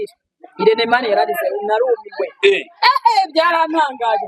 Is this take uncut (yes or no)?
yes